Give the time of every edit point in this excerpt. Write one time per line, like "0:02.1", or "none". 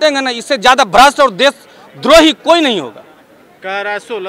none